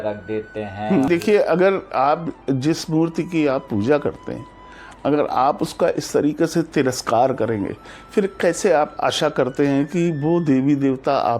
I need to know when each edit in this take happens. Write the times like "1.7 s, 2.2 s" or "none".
1.1 s